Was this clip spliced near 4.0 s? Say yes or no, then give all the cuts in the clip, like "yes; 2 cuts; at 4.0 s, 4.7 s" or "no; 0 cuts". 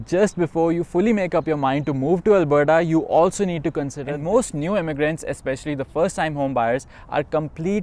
yes; 1 cut; at 4.0 s